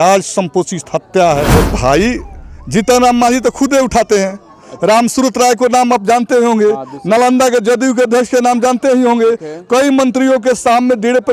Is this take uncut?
no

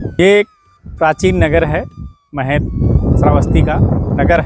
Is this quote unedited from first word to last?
yes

